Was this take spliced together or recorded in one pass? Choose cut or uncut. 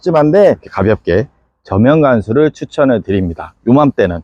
uncut